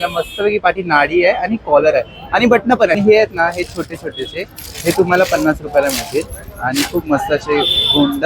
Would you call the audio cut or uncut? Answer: cut